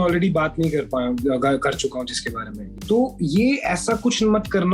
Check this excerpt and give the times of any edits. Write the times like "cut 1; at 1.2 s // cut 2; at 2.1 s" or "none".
cut 1; at 2.7 s